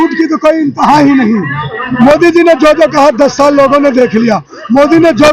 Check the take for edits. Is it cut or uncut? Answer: cut